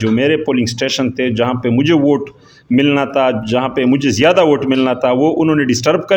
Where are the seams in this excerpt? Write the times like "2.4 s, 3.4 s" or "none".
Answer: none